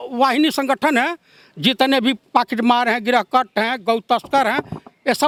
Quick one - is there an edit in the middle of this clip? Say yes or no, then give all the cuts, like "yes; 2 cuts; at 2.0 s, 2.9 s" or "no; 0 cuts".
no; 0 cuts